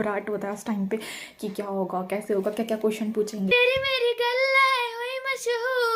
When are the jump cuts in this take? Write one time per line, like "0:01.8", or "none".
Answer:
0:03.5